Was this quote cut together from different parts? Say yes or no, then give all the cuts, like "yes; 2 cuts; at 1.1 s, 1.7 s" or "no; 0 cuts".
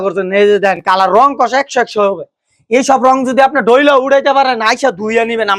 no; 0 cuts